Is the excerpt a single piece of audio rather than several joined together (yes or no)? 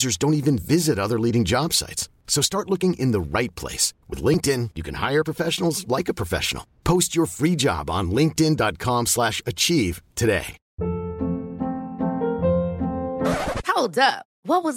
no